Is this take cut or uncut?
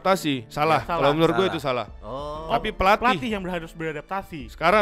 uncut